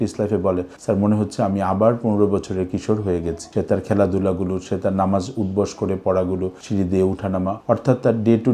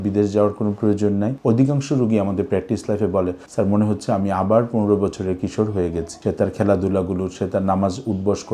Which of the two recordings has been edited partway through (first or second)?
second